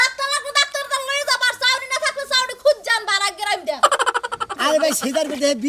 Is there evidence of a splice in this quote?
yes; 1 cut; at 4.6 s

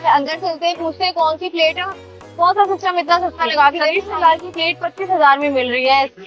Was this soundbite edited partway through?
yes; 1 cut; at 4.0 s

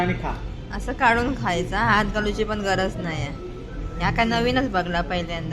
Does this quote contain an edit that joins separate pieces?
no; 0 cuts

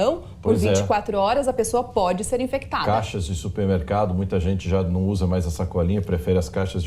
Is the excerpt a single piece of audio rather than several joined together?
no; 1 cut; at 4.1 s

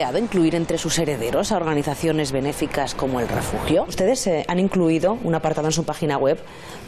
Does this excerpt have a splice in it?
yes; 1 cut; at 4.1 s

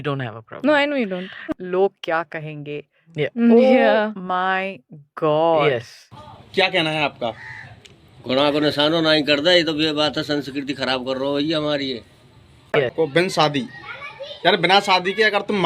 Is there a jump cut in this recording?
yes; 2 cuts; at 6.0 s, 12.9 s

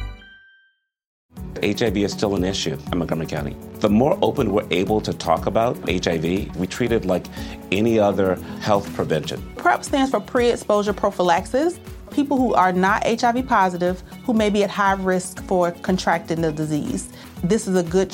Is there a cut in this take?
yes; 1 cut; at 1.2 s

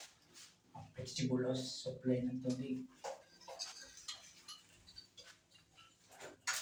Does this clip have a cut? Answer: no; 0 cuts

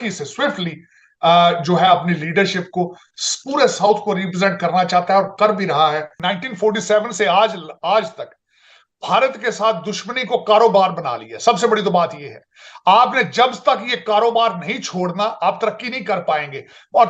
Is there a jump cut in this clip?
yes; 1 cut; at 6.1 s

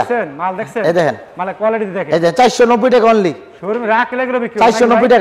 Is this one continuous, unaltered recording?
yes; 0 cuts

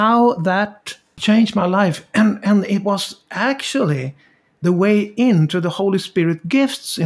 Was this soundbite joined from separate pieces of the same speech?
yes; 1 cut; at 1.1 s

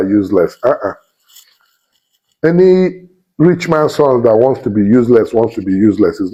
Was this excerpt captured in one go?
yes; 0 cuts

